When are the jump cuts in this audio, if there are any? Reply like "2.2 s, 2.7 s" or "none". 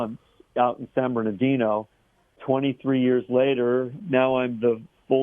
2.4 s, 4.0 s